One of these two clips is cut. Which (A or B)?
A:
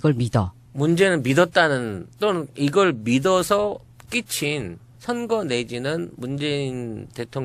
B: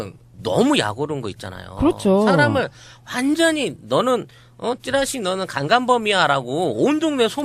B